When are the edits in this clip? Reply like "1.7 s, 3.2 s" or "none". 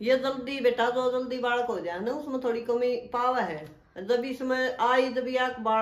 none